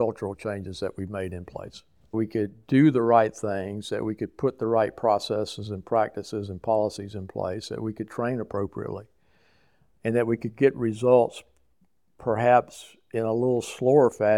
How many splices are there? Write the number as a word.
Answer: one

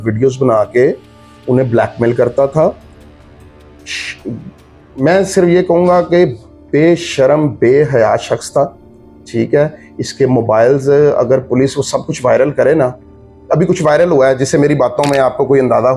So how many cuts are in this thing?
zero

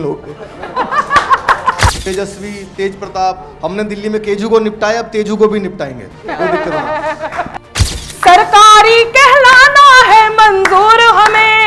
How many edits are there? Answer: two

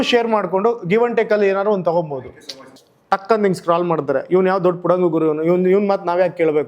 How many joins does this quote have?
one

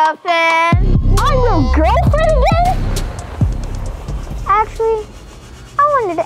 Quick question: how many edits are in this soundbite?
one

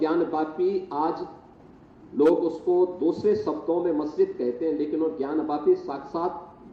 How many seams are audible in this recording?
zero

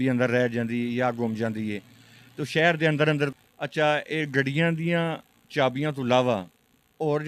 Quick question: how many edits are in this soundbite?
one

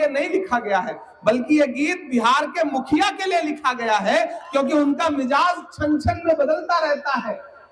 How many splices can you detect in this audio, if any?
zero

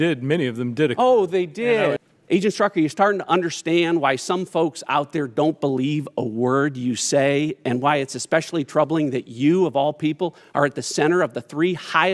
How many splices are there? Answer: one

